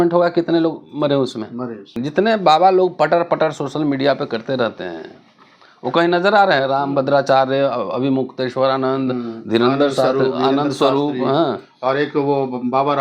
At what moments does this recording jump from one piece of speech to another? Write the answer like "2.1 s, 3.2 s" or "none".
2.0 s